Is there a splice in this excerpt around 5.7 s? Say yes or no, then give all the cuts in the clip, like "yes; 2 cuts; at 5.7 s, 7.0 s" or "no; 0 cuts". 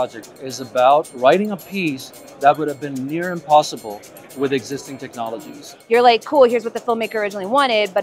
yes; 2 cuts; at 1.1 s, 5.7 s